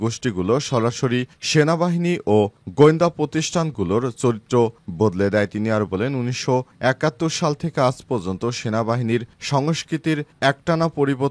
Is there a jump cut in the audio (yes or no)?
no